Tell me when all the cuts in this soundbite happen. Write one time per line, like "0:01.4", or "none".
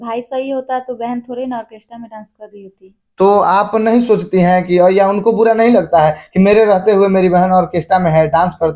none